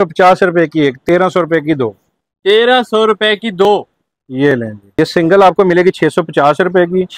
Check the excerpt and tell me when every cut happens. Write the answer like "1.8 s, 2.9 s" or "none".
4.8 s